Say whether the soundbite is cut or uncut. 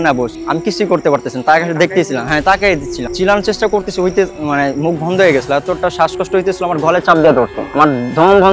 uncut